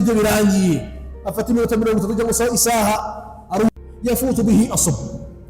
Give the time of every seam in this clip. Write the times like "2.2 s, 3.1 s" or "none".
3.7 s